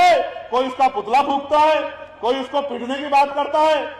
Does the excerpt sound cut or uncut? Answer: uncut